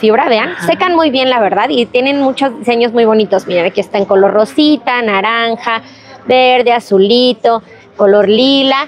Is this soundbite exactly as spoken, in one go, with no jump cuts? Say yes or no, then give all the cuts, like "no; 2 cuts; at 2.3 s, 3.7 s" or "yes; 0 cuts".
yes; 0 cuts